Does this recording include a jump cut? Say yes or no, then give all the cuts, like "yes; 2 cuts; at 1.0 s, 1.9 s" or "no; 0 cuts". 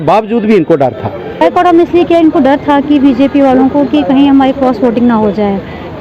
yes; 1 cut; at 1.3 s